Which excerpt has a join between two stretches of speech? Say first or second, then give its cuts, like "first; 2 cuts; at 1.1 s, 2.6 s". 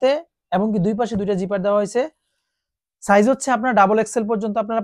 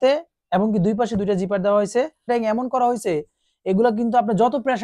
second; 1 cut; at 2.3 s